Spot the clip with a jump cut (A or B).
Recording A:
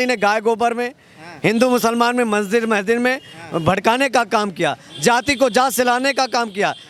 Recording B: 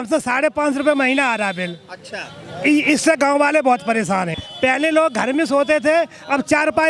B